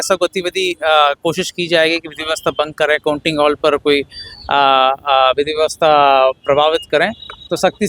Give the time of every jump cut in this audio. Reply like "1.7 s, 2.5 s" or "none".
none